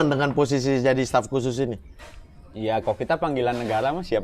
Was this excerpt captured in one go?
yes; 0 cuts

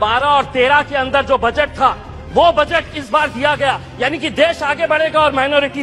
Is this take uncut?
yes; 0 cuts

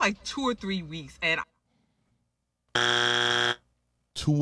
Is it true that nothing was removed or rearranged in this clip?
yes; 0 cuts

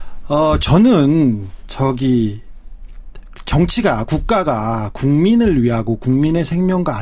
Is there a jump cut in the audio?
yes; 1 cut; at 5.5 s

